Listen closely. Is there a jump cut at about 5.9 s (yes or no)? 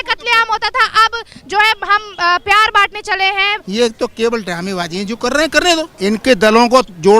yes